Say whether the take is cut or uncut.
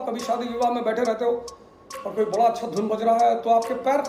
uncut